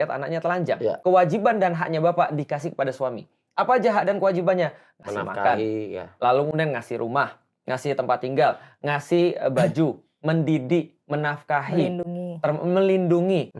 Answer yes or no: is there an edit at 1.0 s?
yes